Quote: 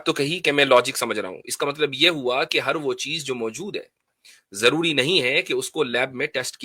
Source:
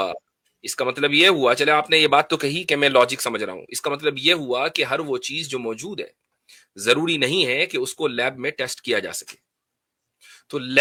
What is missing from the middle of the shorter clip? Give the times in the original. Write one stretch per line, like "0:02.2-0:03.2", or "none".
none